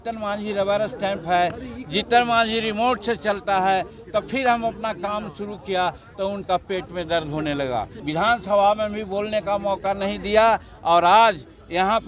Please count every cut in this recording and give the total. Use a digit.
1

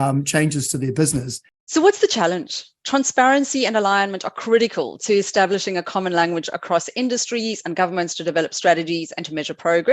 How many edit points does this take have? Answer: 1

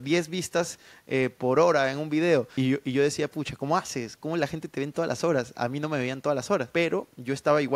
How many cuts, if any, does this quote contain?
2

